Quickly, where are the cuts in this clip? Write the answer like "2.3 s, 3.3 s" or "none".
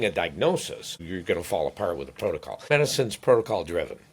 0.9 s, 2.7 s

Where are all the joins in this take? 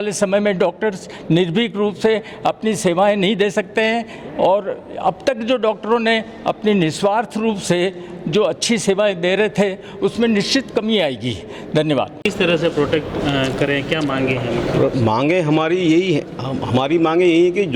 none

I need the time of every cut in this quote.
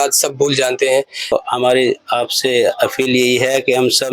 1.3 s

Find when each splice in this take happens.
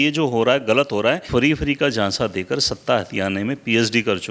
1.2 s

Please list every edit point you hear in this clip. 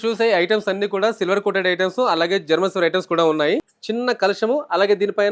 3.8 s

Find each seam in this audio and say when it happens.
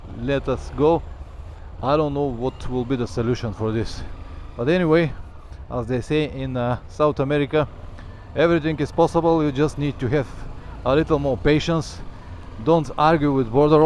none

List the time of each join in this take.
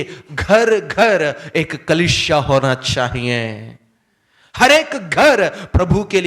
none

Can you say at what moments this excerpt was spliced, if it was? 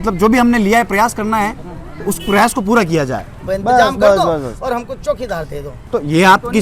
3.3 s, 5.8 s

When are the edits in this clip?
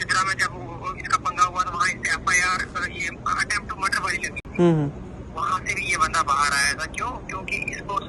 none

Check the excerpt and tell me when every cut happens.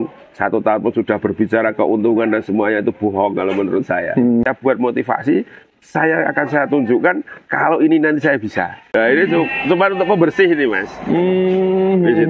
4.4 s, 8.8 s

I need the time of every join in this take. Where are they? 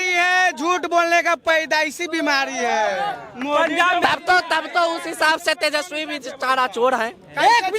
none

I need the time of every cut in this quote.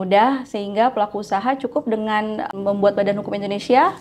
2.5 s

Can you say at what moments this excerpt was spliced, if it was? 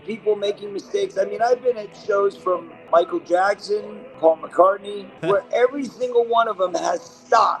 2.7 s, 4.0 s, 5.1 s

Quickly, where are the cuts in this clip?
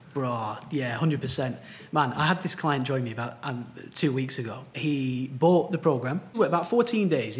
4.7 s, 6.4 s

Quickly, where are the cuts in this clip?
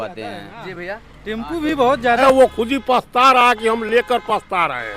2.2 s

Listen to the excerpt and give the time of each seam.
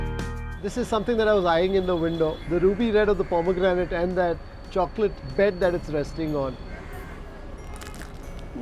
none

